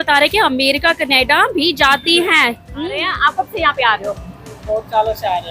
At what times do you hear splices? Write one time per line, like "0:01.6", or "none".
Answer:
0:03.1

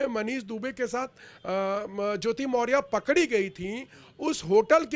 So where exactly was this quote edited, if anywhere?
none

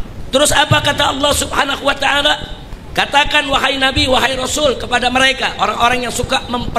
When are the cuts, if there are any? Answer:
0:02.6

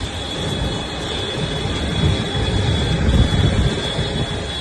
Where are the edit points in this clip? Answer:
none

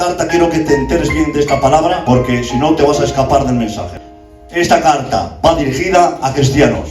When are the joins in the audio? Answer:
0:02.0
0:03.9

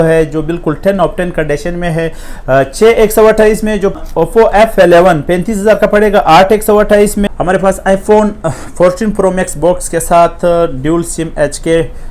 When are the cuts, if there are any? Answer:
0:03.9
0:07.3

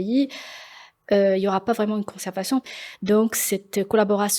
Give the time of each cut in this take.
0:02.7

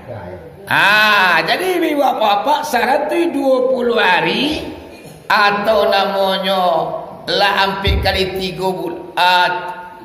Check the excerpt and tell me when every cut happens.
none

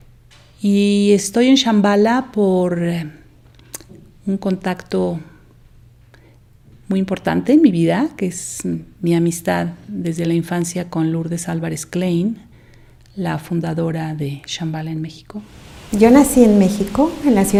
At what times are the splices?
none

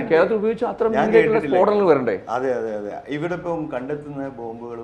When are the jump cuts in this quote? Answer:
none

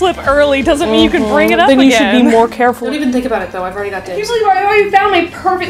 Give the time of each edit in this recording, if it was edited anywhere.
0:01.7
0:02.8
0:04.2

